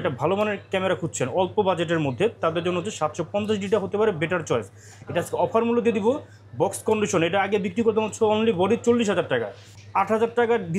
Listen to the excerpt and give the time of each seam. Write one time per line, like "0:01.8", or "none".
none